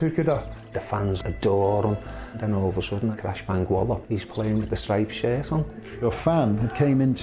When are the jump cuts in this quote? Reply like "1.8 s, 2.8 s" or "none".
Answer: 1.0 s, 2.4 s, 4.0 s, 5.9 s